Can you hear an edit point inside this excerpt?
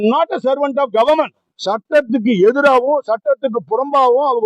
no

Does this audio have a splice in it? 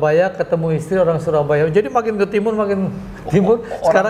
no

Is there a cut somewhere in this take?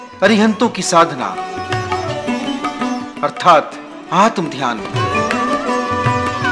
no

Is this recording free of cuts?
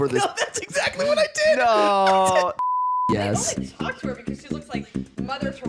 no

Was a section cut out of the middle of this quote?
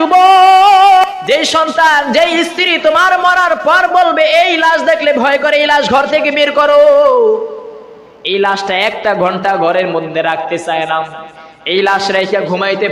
yes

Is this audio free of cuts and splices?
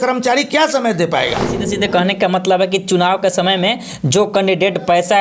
no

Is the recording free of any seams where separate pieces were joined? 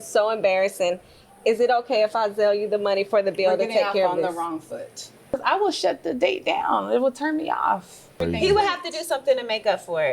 no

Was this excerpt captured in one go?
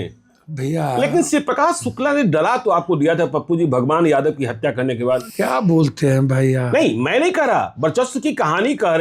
no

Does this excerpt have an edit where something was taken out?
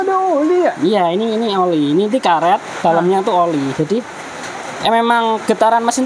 no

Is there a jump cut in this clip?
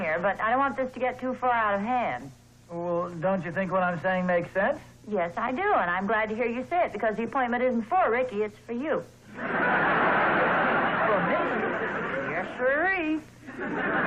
yes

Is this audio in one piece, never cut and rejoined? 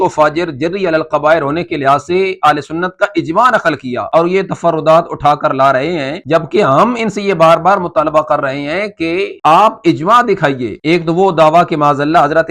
yes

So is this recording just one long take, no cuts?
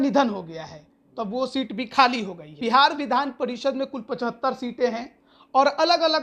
no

